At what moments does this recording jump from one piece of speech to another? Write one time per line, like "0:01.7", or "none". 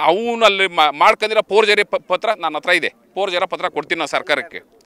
none